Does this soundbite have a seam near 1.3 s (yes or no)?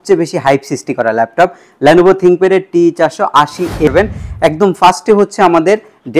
no